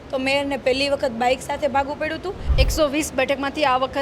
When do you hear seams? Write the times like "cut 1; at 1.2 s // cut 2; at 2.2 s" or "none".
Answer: cut 1; at 2.4 s